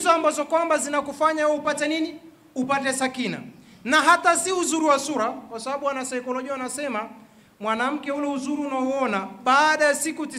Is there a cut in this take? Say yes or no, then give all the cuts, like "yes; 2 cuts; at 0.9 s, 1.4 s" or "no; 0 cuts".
no; 0 cuts